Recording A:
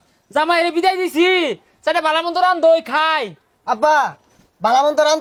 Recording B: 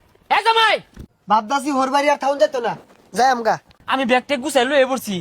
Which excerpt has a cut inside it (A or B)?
B